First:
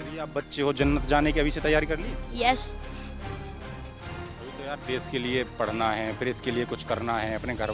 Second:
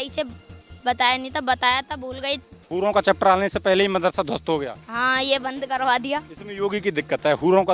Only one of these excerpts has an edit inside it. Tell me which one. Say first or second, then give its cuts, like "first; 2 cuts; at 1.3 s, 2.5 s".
second; 1 cut; at 2.7 s